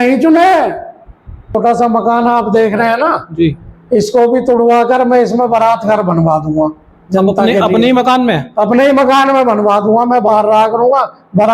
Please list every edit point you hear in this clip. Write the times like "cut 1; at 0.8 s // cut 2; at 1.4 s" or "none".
cut 1; at 1.5 s